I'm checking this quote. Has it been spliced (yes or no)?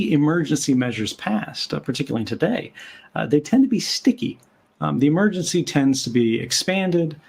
no